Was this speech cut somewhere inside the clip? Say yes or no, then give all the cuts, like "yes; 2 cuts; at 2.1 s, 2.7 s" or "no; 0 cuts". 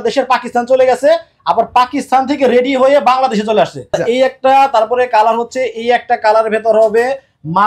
yes; 1 cut; at 3.9 s